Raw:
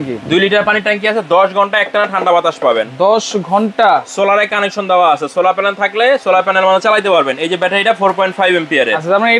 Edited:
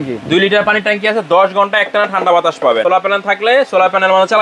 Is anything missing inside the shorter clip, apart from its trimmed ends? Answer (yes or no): yes